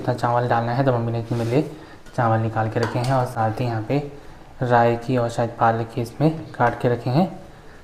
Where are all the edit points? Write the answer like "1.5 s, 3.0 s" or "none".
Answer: none